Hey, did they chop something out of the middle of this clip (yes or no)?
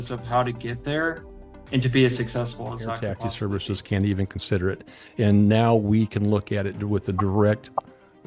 yes